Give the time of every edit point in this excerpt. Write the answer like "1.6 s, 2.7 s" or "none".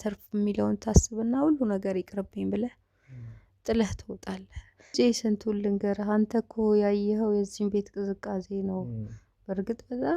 4.9 s